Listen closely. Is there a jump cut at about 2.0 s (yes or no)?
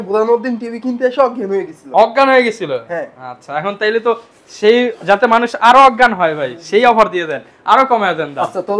no